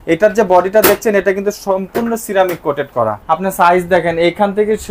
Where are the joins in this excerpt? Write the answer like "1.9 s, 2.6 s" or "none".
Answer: 3.2 s